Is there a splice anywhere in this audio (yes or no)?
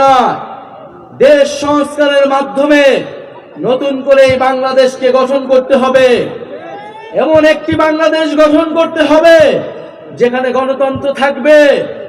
no